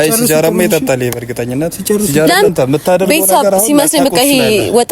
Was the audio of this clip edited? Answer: yes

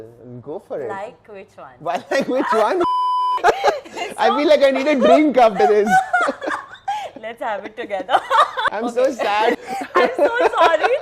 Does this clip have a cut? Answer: yes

